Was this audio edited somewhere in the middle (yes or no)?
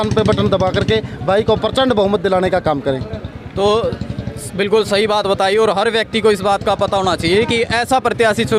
no